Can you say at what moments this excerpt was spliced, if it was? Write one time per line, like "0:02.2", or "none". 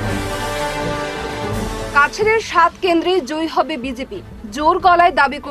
0:01.4